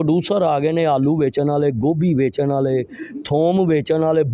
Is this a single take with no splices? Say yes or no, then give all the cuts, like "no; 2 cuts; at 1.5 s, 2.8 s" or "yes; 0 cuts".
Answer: yes; 0 cuts